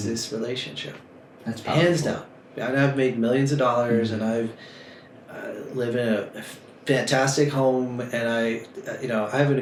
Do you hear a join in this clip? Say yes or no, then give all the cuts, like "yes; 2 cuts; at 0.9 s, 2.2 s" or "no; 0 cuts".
no; 0 cuts